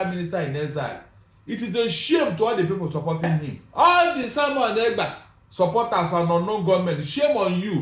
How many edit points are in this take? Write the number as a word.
one